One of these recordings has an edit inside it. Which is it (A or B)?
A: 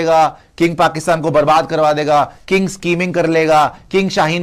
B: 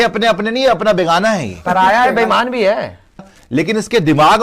B